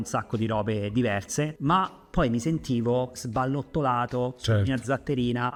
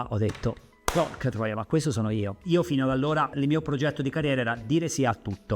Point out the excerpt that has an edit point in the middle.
second; 2 cuts; at 2.4 s, 3.3 s

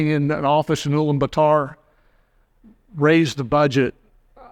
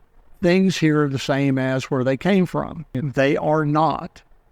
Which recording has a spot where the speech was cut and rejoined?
second; 1 cut; at 2.8 s

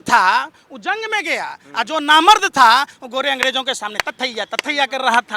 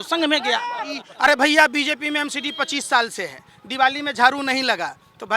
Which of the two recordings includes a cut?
second; 1 cut; at 1.1 s

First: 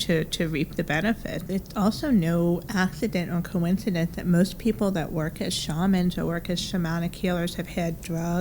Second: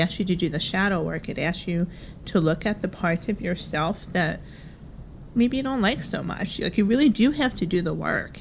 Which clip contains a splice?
first; 1 cut; at 1.5 s

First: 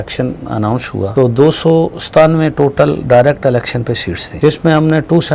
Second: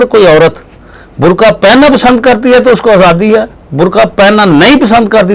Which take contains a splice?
first; 2 cuts; at 1.1 s, 4.3 s

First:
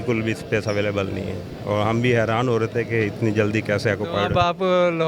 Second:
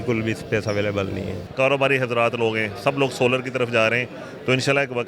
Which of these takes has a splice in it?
second; 1 cut; at 1.4 s

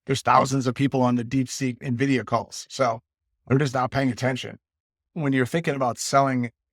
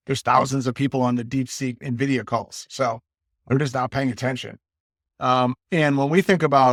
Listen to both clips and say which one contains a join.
first; 1 cut; at 5.1 s

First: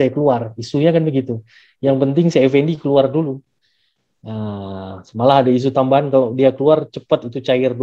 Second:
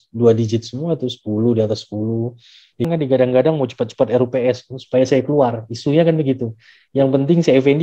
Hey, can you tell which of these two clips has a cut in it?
second; 1 cut; at 2.9 s

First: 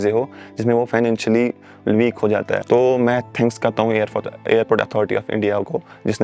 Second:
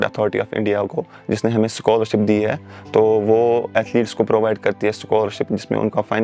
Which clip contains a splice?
first; 1 cut; at 2.6 s

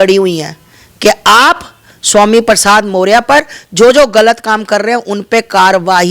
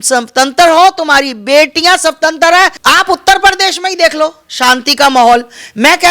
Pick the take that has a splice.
second; 1 cut; at 2.8 s

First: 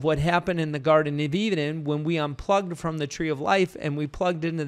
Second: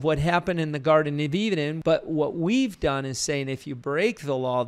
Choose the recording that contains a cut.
second; 1 cut; at 1.7 s

